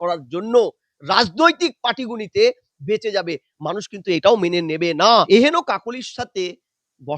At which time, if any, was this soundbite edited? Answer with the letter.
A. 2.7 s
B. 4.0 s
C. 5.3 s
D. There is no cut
C